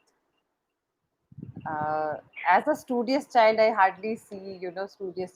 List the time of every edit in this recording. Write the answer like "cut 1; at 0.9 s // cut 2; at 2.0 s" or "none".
none